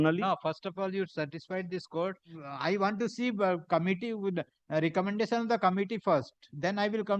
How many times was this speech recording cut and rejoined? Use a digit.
1